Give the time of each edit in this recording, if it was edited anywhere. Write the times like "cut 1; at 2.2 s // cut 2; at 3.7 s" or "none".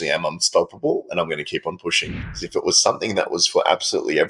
cut 1; at 2.4 s